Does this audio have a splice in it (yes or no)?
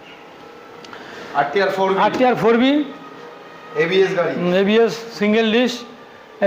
no